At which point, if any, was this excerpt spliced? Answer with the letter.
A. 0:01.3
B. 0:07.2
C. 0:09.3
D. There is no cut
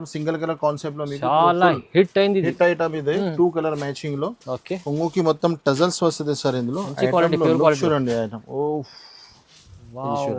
D